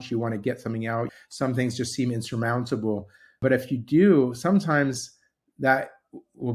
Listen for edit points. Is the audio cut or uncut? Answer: cut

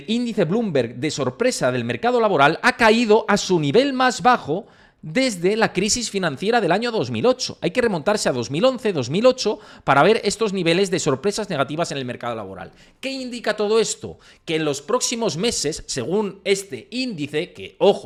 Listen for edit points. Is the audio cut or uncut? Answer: uncut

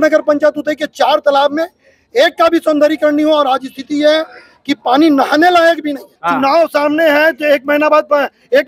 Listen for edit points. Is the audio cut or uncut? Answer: cut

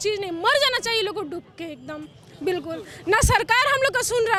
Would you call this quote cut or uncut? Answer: uncut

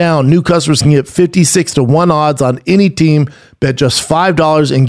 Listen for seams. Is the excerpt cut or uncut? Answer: uncut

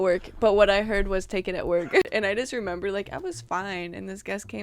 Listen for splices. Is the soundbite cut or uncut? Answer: cut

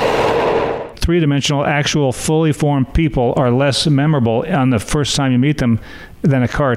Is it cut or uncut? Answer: cut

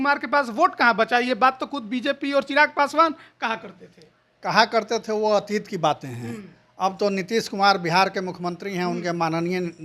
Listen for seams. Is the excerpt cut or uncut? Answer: uncut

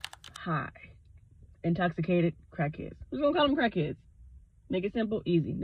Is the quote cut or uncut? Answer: uncut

